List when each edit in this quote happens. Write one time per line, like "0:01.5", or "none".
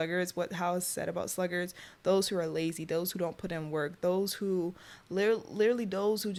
none